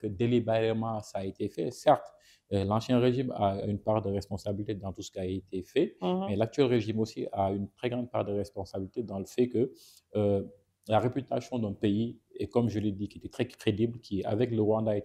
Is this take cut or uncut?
uncut